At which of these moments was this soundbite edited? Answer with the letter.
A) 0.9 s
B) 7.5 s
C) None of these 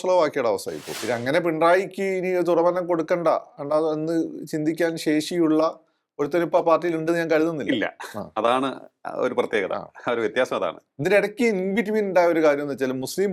A